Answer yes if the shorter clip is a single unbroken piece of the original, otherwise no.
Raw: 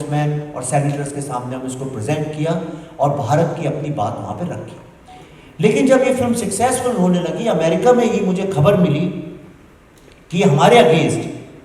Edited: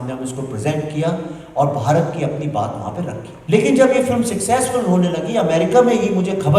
no